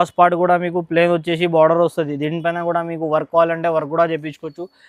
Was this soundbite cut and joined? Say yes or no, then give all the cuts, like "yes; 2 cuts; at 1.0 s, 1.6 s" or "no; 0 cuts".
no; 0 cuts